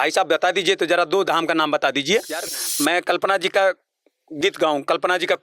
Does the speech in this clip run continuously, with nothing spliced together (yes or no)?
no